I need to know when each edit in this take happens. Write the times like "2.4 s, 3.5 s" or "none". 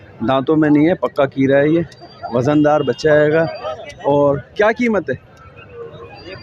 none

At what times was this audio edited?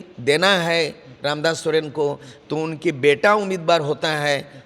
none

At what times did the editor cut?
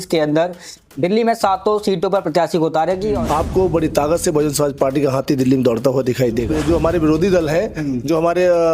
3.2 s, 6.5 s

